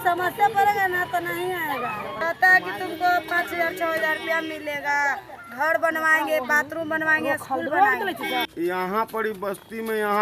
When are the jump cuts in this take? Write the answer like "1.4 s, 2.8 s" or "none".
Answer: 2.2 s, 8.5 s

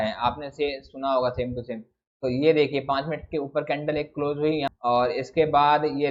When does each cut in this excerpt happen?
4.7 s

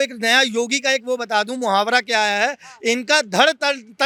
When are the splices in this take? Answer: none

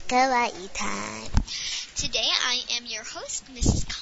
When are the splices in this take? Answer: none

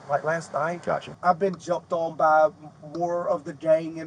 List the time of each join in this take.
1.1 s

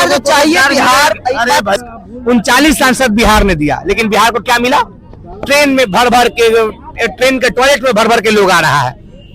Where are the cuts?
1.8 s

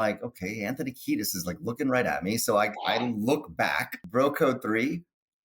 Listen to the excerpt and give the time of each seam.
3.9 s

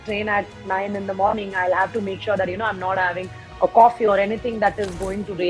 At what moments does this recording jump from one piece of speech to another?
none

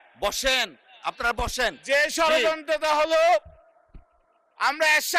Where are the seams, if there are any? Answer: none

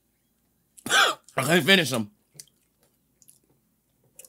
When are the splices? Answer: 1.2 s

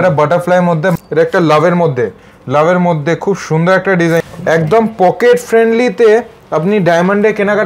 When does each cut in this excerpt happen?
1.0 s, 4.2 s

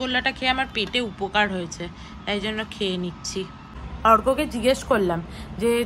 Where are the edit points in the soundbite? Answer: none

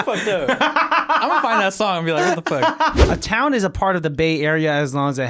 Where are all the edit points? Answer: 3.0 s

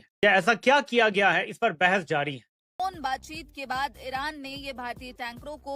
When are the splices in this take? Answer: 2.7 s

